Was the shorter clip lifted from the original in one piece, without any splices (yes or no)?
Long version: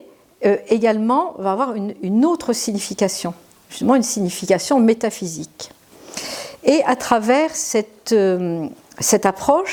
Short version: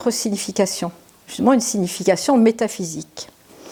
yes